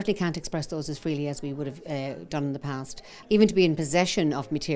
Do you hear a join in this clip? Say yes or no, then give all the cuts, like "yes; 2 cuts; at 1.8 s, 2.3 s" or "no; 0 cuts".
yes; 1 cut; at 3.2 s